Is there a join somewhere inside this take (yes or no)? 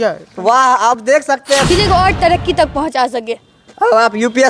yes